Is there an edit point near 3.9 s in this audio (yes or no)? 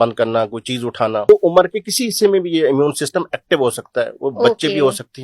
no